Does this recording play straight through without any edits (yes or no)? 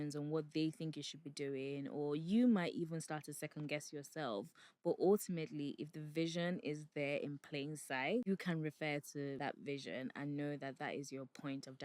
no